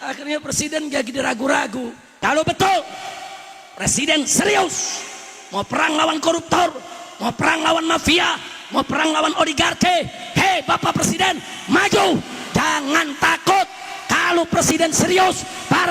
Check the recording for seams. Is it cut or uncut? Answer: cut